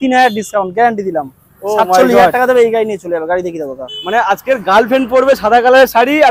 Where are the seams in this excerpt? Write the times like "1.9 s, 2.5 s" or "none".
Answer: none